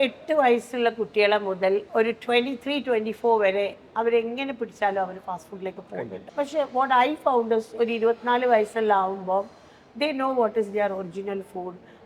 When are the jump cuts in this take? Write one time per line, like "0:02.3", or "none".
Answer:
0:01.9
0:06.2